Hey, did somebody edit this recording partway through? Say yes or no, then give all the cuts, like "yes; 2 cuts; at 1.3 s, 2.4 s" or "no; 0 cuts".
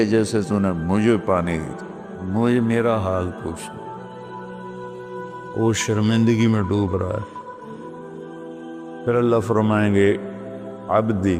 yes; 4 cuts; at 3.6 s, 5.3 s, 7.4 s, 8.9 s